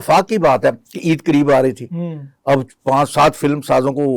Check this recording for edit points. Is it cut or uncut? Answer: uncut